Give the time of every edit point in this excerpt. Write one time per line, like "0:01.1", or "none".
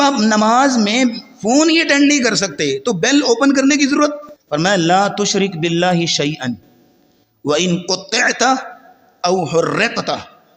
0:04.3